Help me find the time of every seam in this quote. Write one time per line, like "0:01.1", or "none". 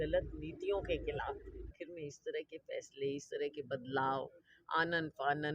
0:01.8